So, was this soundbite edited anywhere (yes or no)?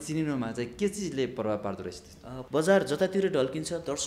yes